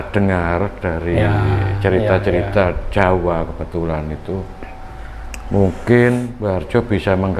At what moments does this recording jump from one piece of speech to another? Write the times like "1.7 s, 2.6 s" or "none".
6.3 s